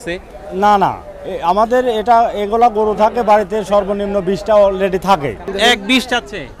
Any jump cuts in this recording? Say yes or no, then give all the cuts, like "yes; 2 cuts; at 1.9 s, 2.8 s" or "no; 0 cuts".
yes; 1 cut; at 5.5 s